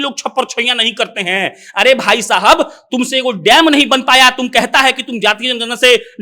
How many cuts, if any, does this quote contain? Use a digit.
0